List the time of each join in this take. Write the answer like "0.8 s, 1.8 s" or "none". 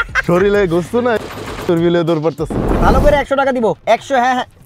2.7 s